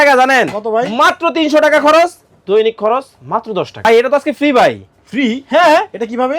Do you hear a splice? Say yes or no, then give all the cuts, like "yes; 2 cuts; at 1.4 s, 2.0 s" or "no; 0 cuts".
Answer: yes; 1 cut; at 3.8 s